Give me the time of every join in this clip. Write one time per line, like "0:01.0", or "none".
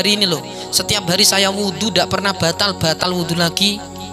0:03.0